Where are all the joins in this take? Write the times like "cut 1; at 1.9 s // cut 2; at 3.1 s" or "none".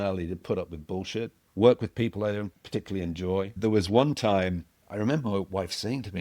cut 1; at 1.4 s // cut 2; at 2.6 s // cut 3; at 3.5 s // cut 4; at 4.7 s